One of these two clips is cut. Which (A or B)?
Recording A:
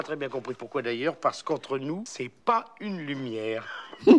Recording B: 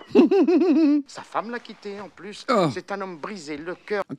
B